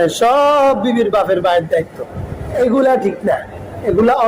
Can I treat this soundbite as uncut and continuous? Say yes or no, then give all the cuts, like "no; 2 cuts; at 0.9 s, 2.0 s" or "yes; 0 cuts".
no; 1 cut; at 2.5 s